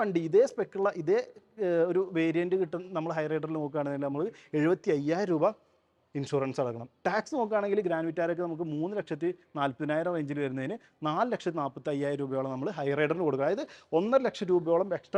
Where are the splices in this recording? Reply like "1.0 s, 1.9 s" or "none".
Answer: none